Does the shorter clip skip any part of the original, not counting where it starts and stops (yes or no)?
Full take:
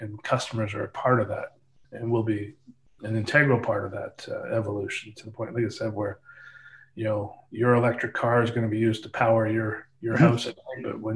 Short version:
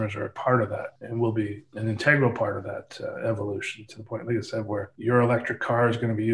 yes